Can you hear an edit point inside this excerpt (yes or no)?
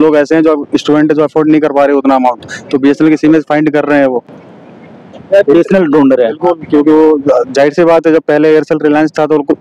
no